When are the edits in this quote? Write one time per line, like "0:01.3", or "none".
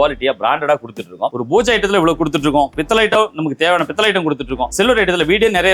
0:01.4
0:04.7